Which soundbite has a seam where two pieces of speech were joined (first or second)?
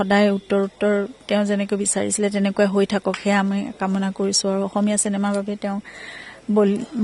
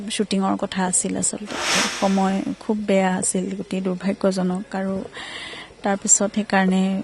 second